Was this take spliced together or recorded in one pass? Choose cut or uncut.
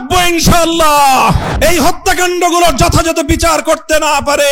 cut